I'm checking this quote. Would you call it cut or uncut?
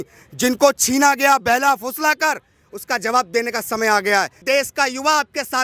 cut